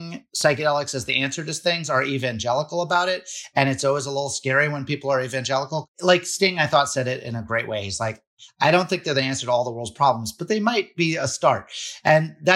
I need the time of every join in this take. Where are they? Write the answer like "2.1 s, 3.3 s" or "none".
5.9 s